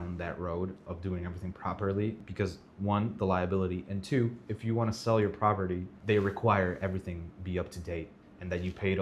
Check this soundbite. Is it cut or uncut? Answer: cut